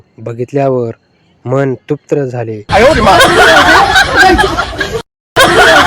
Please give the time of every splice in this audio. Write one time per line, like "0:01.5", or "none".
0:02.3